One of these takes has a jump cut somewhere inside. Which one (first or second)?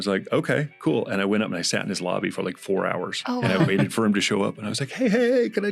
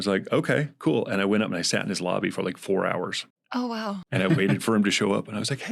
first